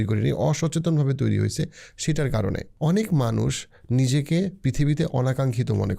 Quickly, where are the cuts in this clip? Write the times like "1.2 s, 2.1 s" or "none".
2.7 s